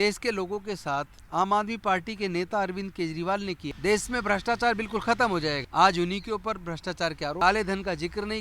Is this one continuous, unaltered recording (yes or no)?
no